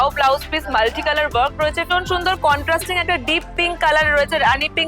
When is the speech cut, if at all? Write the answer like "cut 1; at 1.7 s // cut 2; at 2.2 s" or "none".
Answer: cut 1; at 1.9 s